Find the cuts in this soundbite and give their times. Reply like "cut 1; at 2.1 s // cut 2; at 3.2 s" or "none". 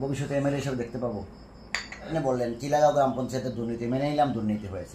cut 1; at 2.1 s